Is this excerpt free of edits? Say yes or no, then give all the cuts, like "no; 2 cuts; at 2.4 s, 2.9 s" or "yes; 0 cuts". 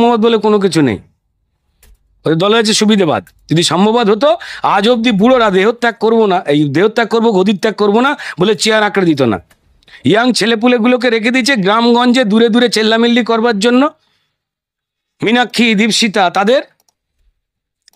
yes; 0 cuts